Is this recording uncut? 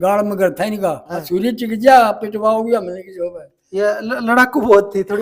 no; 1 cut; at 1.1 s

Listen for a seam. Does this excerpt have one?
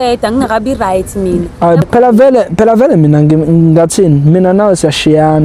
yes; 1 cut; at 1.8 s

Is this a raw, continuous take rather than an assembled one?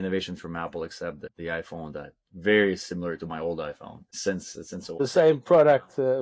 no; 1 cut; at 5.0 s

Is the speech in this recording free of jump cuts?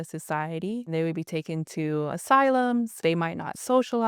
no; 3 cuts; at 0.9 s, 2.2 s, 3.0 s

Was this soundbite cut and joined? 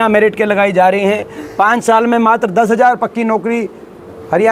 no; 0 cuts

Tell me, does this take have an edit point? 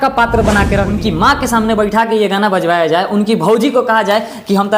yes; 1 cut; at 1.0 s

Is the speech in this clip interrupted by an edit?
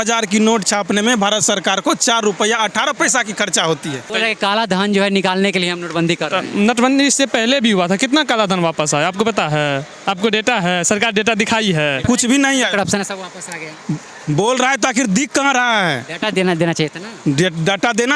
yes; 2 cuts; at 4.1 s, 12.0 s

